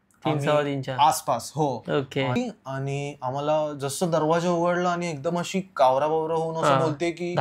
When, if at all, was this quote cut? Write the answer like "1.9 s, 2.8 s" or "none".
2.4 s